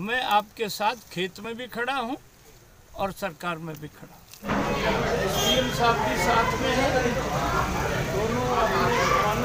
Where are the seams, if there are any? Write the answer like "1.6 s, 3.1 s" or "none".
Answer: none